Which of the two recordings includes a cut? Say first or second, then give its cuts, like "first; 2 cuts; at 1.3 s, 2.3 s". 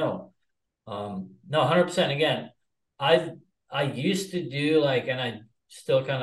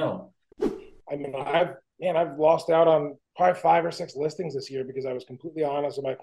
second; 3 cuts; at 0.9 s, 1.8 s, 3.2 s